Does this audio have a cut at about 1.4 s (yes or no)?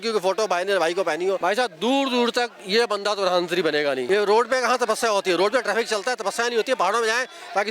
yes